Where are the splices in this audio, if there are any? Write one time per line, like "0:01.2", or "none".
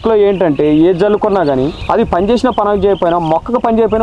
0:01.8